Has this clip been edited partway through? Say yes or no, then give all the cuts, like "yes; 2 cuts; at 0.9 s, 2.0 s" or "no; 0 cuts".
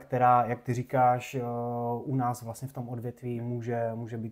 no; 0 cuts